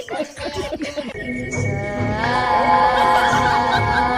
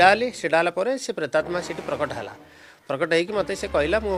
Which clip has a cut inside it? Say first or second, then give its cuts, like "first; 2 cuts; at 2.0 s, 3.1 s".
first; 1 cut; at 1.1 s